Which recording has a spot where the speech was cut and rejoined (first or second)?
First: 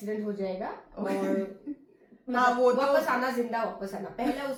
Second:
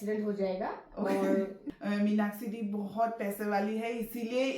second